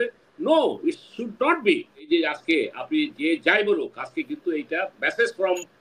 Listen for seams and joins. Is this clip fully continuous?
no; 1 cut; at 2.1 s

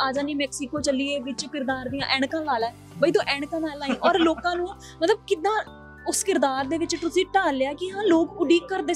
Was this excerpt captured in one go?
yes; 0 cuts

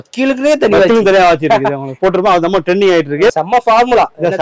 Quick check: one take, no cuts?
no; 1 cut; at 3.3 s

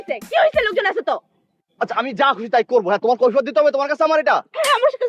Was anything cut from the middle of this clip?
no; 0 cuts

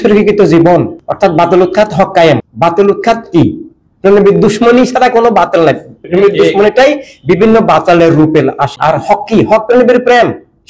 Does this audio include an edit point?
yes; 3 cuts; at 1.0 s, 2.5 s, 8.7 s

